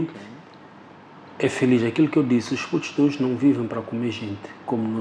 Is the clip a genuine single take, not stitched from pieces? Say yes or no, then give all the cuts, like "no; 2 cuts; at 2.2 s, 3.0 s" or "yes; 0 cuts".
yes; 0 cuts